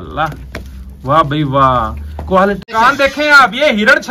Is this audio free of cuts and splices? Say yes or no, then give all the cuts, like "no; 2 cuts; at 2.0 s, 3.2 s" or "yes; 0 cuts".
no; 1 cut; at 2.7 s